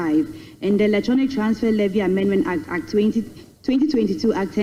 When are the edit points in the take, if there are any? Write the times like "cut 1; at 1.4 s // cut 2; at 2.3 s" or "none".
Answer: none